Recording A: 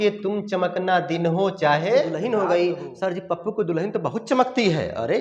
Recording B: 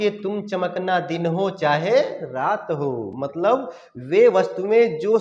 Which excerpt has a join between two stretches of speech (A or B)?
A